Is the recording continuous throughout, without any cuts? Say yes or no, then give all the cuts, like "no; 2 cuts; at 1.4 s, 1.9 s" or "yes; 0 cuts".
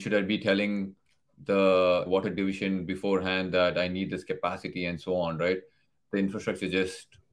no; 2 cuts; at 2.1 s, 6.0 s